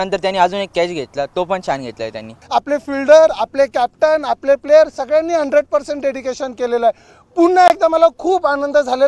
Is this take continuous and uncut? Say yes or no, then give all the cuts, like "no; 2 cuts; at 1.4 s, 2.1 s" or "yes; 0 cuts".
no; 1 cut; at 2.3 s